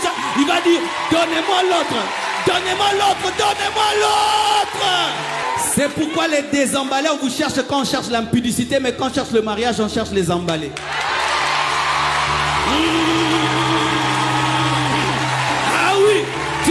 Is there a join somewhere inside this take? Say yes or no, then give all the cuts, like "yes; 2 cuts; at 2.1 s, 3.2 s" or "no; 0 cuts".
yes; 1 cut; at 5.4 s